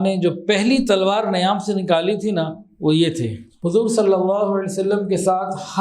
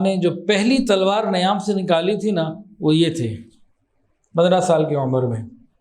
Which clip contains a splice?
first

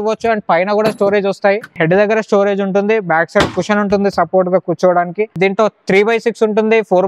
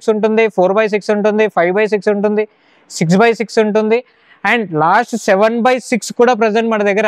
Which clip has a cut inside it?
first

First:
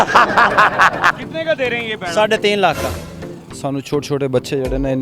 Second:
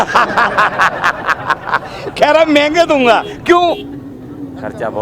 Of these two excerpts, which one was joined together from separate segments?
first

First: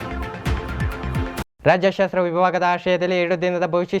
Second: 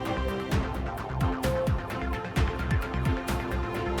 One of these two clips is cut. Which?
first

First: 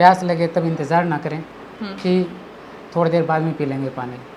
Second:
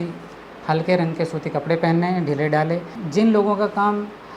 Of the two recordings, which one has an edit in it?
second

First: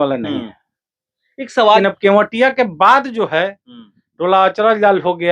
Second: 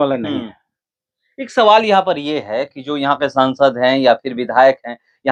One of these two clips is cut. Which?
first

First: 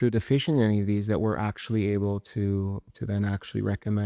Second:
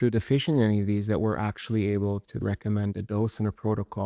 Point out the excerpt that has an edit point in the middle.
second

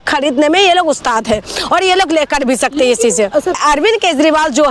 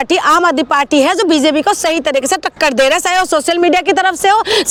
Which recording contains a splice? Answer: first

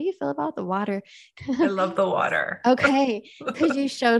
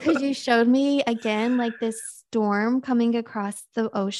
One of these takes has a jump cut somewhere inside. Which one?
first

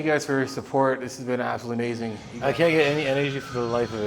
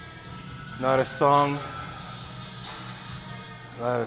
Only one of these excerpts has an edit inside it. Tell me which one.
first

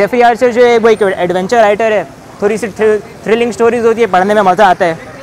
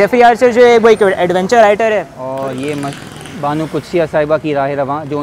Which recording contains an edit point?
second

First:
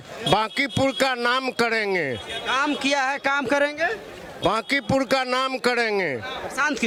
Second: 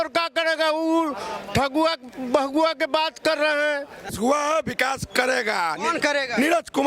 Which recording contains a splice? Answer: second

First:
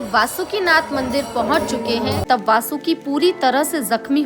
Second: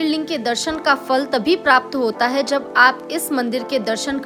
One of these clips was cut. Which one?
first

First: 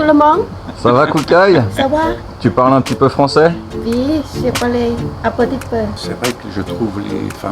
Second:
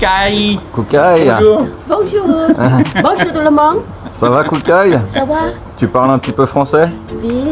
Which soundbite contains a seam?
first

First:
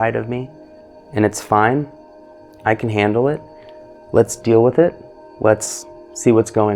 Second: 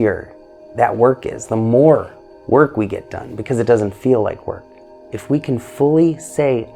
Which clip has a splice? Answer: second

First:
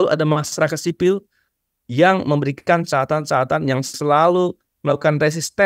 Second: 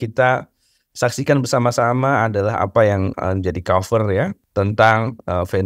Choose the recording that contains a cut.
second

